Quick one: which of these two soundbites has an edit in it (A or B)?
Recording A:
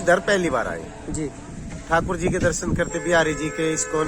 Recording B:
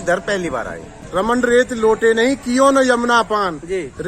B